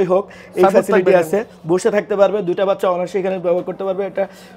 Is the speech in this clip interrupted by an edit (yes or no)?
no